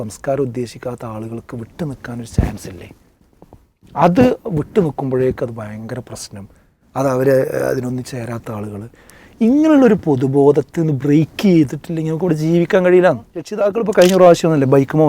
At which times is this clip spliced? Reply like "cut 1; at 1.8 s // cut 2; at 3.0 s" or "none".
cut 1; at 13.6 s